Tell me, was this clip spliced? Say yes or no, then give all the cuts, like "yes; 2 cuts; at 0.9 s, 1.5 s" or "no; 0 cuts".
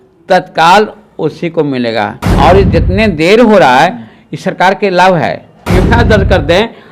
yes; 2 cuts; at 2.3 s, 5.8 s